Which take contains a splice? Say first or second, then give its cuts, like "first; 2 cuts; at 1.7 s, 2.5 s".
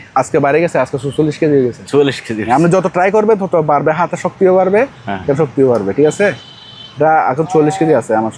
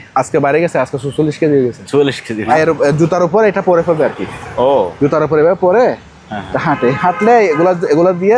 second; 1 cut; at 2.5 s